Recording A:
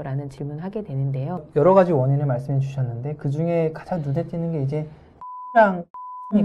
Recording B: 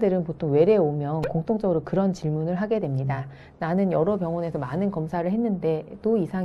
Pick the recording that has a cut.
A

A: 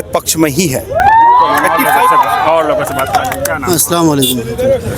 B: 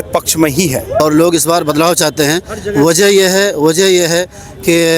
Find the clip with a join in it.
B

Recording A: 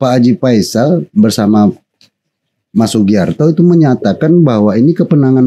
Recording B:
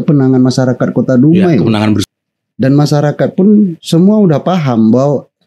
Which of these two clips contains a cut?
B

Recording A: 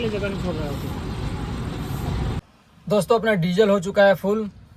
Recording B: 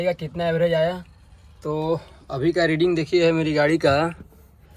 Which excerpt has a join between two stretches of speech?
A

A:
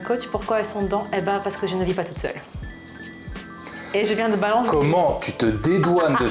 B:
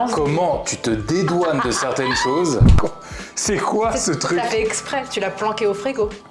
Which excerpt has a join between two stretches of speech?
B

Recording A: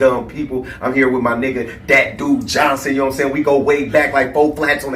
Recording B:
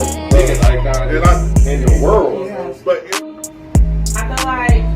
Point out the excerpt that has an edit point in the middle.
A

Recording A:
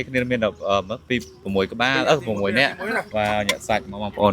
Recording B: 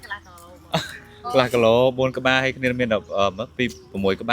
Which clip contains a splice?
A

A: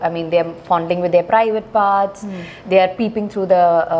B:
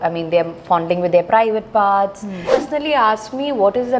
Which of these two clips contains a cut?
B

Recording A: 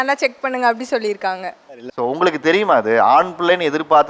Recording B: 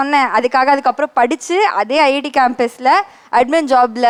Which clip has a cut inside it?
A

